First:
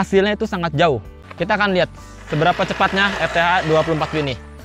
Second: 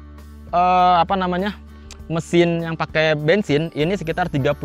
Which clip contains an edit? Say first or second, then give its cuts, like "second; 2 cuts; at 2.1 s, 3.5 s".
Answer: first; 1 cut; at 1.1 s